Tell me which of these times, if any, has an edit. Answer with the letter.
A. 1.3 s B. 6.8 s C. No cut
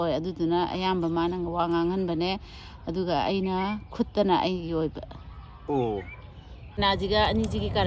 B